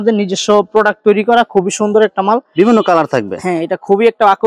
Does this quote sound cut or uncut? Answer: uncut